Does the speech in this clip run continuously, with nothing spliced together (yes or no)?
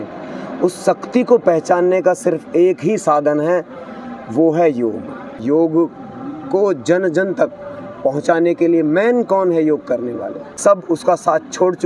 no